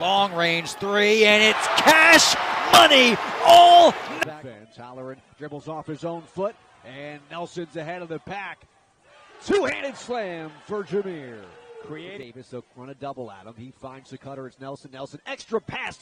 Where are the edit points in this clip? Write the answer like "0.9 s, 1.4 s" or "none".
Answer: none